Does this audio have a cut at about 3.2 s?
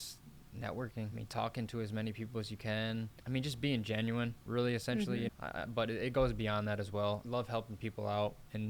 yes; 4 cuts; at 1.2 s, 3.2 s, 5.3 s, 7.2 s

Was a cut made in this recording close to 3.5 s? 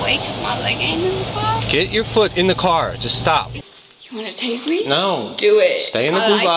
yes; 1 cut; at 3.5 s

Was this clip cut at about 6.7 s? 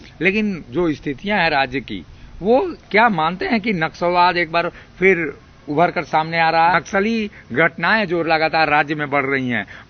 yes; 1 cut; at 6.7 s

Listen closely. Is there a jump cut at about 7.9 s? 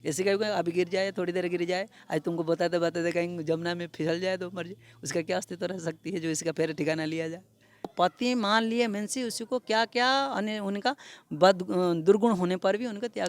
yes; 1 cut; at 7.9 s

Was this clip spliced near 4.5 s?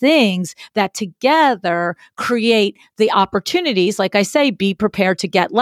no; 0 cuts

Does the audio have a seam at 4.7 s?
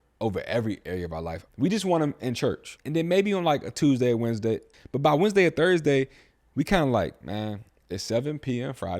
yes; 3 cuts; at 1.4 s, 2.7 s, 4.7 s

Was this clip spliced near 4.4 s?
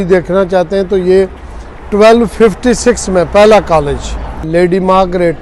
yes; 1 cut; at 4.4 s

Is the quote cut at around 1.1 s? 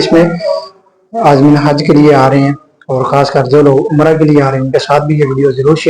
no; 0 cuts

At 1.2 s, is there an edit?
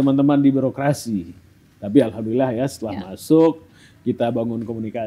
no; 0 cuts

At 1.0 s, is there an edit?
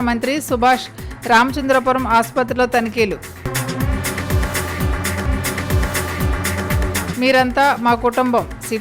no; 0 cuts

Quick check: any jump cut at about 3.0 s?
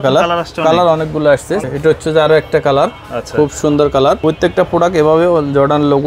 no; 2 cuts; at 1.6 s, 4.2 s

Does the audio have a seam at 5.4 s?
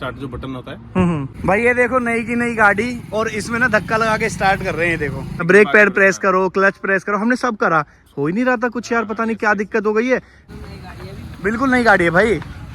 yes; 3 cuts; at 1.3 s, 5.4 s, 10.4 s

